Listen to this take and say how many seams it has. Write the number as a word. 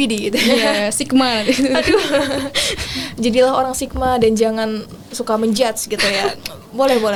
zero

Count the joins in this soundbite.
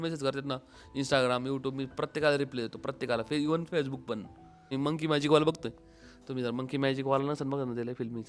one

